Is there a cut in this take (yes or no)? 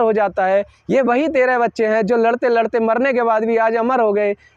no